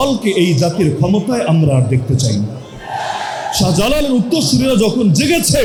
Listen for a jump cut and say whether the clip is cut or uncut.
uncut